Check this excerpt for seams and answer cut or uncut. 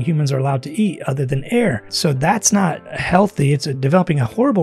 cut